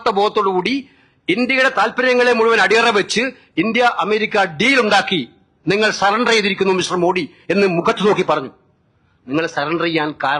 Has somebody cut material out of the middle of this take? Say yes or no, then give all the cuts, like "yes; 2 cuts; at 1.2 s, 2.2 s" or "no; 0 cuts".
no; 0 cuts